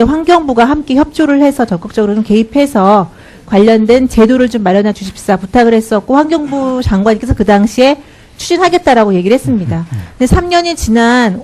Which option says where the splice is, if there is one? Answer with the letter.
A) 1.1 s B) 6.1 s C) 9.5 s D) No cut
B